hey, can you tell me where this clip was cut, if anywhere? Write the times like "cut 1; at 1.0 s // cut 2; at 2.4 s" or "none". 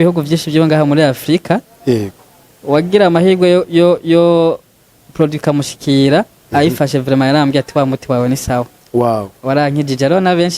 none